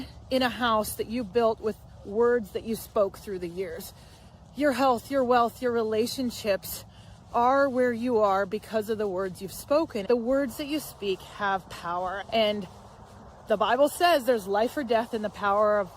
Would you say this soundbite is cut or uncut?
cut